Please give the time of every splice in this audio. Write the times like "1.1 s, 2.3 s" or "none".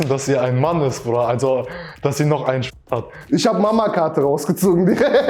3.2 s